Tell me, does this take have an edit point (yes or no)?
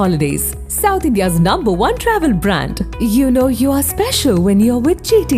no